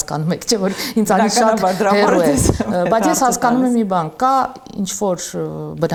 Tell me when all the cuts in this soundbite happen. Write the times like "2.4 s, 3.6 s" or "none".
none